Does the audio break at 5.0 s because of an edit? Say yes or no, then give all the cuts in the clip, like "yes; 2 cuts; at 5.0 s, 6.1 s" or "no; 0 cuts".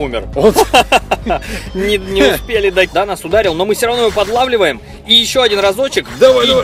no; 1 cut; at 2.9 s